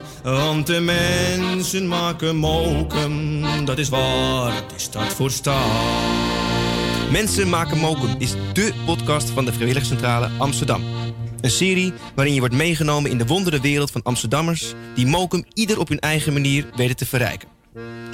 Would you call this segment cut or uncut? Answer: uncut